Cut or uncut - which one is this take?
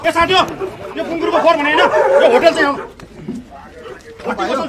uncut